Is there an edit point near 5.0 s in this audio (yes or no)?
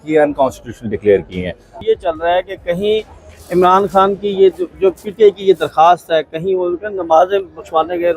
no